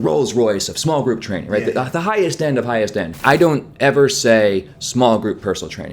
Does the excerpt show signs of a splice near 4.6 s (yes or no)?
no